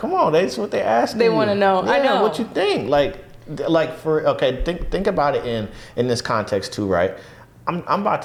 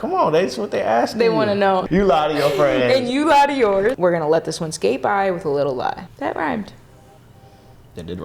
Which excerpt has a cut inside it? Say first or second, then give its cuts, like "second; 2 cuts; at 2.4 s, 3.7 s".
second; 3 cuts; at 1.8 s, 4.0 s, 6.1 s